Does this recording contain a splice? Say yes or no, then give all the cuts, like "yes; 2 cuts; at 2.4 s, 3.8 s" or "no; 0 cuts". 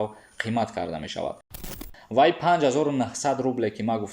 yes; 1 cut; at 1.6 s